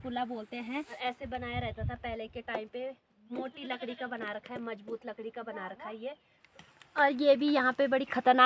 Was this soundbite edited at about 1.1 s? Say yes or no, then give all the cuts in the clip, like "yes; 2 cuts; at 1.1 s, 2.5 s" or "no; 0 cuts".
yes; 2 cuts; at 1.1 s, 6.3 s